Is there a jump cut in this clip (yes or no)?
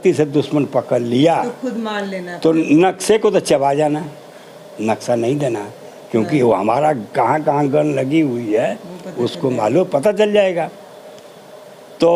no